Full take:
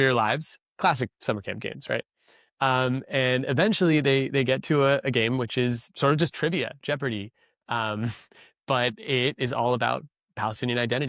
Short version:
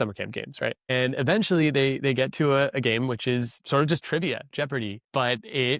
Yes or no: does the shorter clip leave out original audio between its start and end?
yes